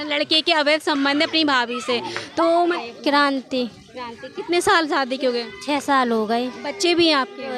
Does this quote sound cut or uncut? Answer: cut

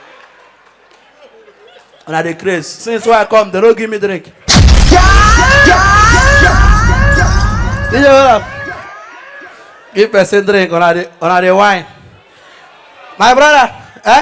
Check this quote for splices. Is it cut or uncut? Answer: uncut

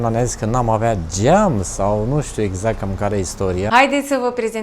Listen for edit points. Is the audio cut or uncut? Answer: cut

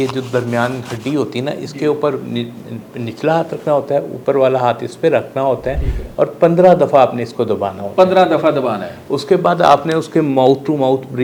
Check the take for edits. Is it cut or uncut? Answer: uncut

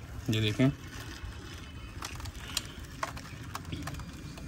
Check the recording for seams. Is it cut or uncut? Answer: uncut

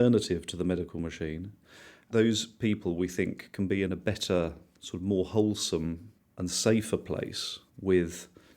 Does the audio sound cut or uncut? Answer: cut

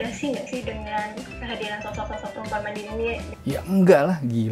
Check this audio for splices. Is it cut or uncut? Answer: cut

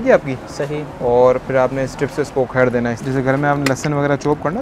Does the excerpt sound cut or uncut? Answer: cut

